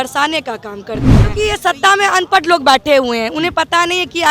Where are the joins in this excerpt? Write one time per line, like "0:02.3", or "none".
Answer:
0:01.3